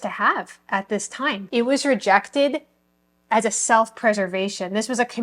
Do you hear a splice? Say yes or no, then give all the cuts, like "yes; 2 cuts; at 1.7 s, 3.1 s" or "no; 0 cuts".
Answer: yes; 1 cut; at 1.4 s